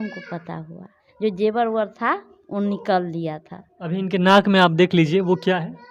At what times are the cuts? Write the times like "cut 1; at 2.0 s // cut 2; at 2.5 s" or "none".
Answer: cut 1; at 1.0 s

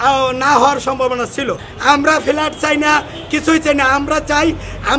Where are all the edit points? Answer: cut 1; at 1.6 s

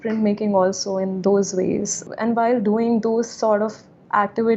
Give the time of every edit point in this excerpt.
cut 1; at 2.0 s

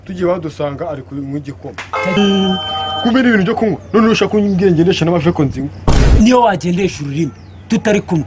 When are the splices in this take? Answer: cut 1; at 2.2 s

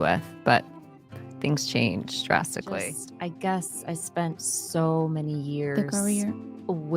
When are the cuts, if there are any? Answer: cut 1; at 2.7 s

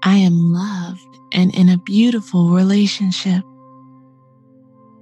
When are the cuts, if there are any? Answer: cut 1; at 3.5 s

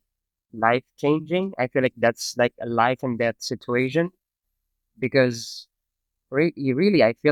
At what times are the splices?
none

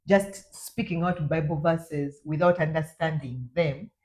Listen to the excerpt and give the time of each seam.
none

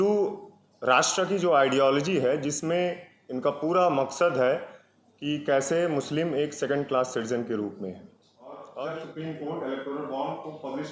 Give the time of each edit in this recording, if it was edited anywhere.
cut 1; at 8.7 s

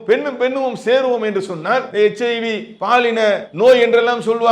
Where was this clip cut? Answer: cut 1; at 1.9 s // cut 2; at 3.5 s

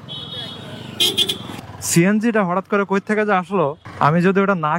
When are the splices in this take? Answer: cut 1; at 1.6 s // cut 2; at 3.8 s

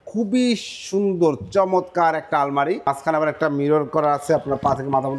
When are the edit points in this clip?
cut 1; at 2.8 s

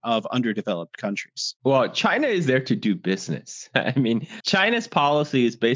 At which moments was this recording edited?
cut 1; at 4.4 s

